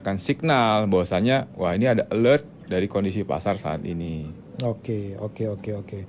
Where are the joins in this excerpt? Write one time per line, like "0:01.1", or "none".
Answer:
none